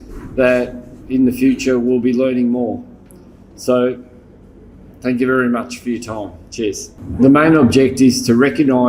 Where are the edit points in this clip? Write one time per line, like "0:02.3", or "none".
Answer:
0:07.0